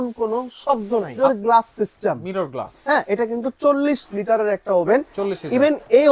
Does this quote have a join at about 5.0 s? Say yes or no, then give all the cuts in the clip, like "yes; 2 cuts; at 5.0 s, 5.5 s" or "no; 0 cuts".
no; 1 cut; at 1.1 s